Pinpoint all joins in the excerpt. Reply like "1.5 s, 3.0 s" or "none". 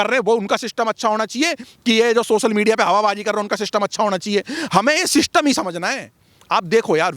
none

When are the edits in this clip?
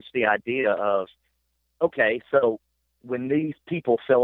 none

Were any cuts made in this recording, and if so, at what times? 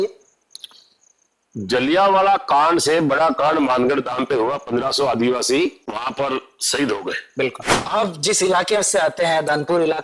7.8 s

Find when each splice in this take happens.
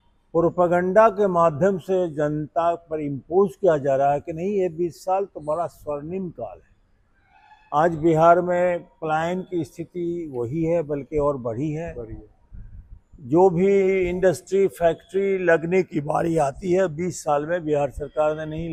none

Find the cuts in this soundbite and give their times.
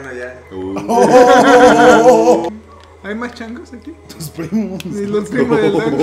2.5 s

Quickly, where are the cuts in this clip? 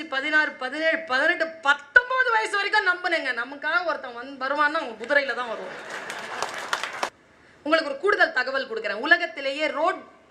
7.1 s

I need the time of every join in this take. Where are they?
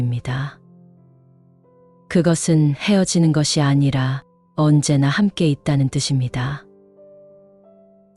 none

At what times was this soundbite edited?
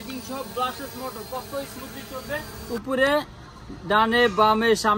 2.5 s

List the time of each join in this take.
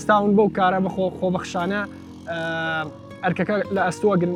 none

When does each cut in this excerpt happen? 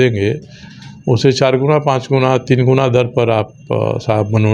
none

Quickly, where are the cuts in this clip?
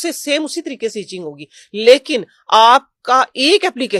none

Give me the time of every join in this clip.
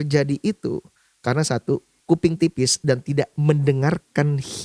1.9 s

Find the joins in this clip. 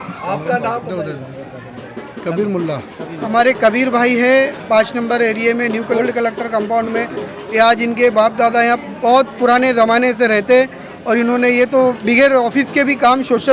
3.2 s, 6.0 s

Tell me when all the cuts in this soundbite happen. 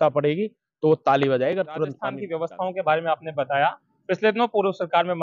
2.1 s

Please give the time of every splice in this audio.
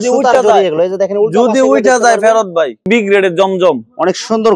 2.9 s

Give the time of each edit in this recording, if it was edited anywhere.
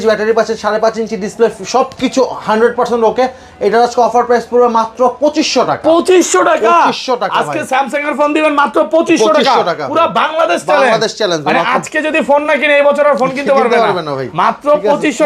none

